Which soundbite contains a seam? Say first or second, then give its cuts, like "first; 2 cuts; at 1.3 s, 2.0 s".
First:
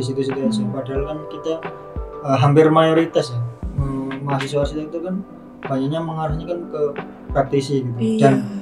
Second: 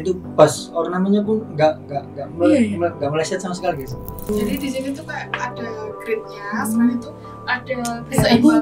second; 1 cut; at 4.3 s